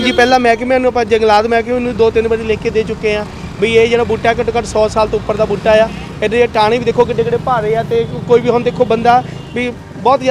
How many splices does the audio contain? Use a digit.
0